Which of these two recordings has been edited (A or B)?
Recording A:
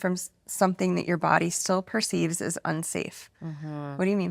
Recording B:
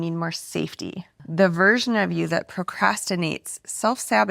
B